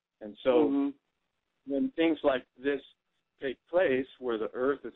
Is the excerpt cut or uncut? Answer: uncut